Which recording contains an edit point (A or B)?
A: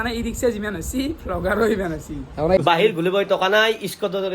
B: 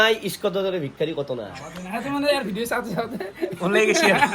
A